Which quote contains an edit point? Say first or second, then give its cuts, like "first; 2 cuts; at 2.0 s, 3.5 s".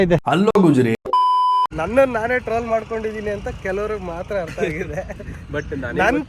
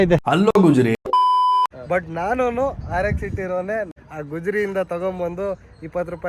second; 2 cuts; at 1.8 s, 3.9 s